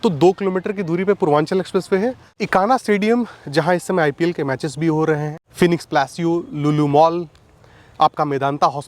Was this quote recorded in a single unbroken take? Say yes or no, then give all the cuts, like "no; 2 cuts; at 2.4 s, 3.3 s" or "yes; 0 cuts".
no; 2 cuts; at 2.3 s, 5.4 s